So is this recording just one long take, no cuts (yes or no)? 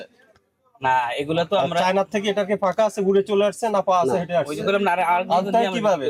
yes